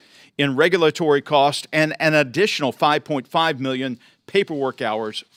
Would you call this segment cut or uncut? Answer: uncut